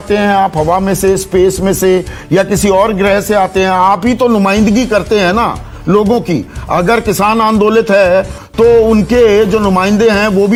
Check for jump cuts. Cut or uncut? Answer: uncut